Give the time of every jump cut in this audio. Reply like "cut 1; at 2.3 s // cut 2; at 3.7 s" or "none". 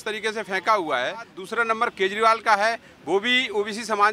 cut 1; at 1.4 s

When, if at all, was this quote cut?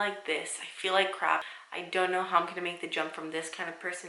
cut 1; at 1.5 s

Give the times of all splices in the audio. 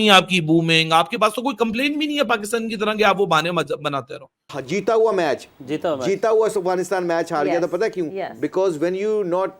cut 1; at 4.5 s

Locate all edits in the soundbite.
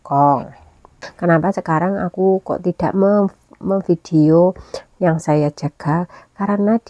cut 1; at 1.0 s

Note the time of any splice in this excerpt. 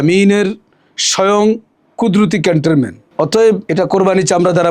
cut 1; at 3.0 s // cut 2; at 3.6 s

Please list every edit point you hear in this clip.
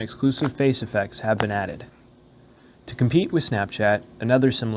none

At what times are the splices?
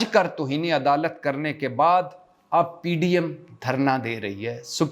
none

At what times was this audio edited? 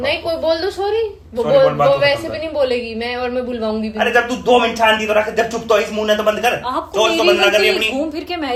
none

